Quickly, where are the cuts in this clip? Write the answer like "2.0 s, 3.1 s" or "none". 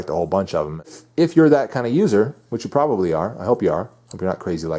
1.0 s